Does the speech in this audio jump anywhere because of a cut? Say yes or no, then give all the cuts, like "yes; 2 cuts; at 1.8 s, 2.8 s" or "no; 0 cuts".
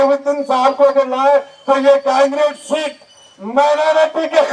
no; 0 cuts